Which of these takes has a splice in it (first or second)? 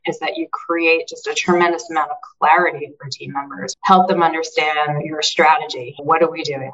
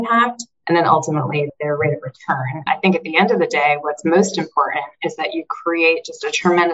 second